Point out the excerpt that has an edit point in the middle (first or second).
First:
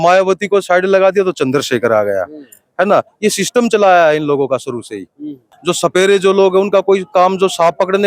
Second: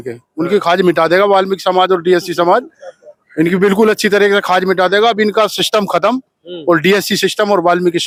first